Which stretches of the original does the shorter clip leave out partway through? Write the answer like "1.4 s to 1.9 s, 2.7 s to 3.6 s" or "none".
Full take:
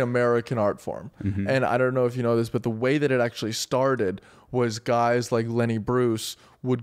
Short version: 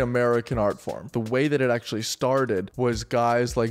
1.1 s to 2.6 s, 4.2 s to 4.4 s